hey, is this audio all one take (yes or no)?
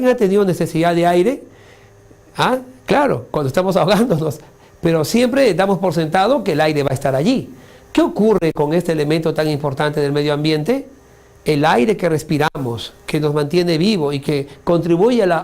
no